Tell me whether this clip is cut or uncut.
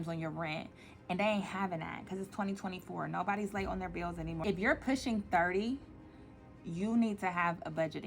cut